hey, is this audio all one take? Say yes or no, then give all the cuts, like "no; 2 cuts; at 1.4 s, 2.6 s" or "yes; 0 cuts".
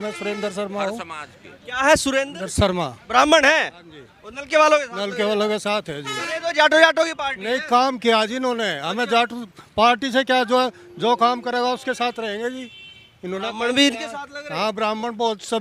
yes; 0 cuts